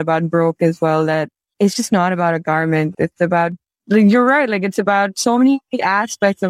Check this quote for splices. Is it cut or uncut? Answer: uncut